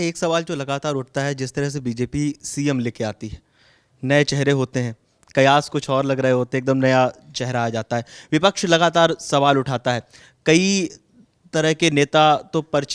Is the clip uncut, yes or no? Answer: yes